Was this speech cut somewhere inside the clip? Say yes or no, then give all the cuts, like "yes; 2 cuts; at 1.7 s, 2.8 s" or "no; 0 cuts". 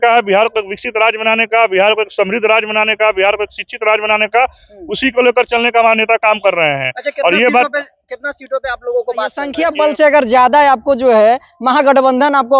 yes; 1 cut; at 9.5 s